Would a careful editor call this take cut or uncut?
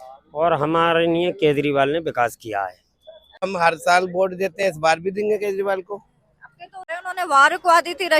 cut